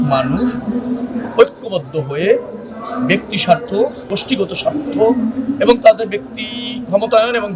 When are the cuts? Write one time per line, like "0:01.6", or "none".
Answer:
0:04.1